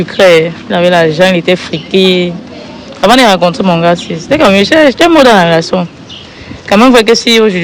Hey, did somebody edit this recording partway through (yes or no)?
no